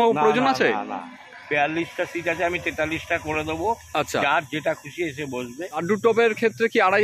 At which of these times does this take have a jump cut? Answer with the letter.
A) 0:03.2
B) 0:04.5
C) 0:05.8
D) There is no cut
C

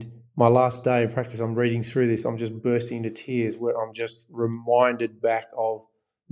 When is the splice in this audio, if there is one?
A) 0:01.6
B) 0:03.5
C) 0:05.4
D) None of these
D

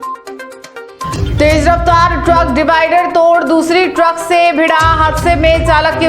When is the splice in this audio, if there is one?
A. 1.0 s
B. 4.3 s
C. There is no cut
A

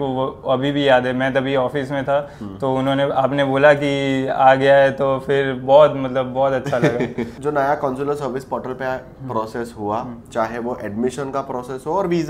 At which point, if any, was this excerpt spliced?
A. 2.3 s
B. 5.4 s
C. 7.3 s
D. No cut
C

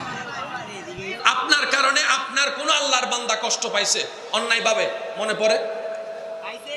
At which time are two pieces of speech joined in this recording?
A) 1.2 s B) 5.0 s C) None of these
A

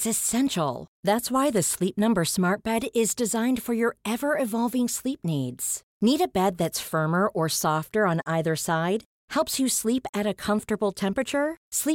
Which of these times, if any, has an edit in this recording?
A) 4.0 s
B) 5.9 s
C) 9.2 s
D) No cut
D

